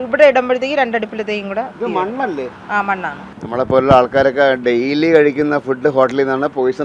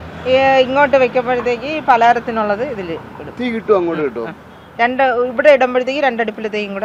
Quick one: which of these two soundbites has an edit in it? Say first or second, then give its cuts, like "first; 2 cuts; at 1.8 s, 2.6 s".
first; 1 cut; at 3.3 s